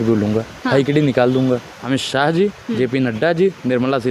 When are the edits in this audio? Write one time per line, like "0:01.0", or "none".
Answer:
0:01.8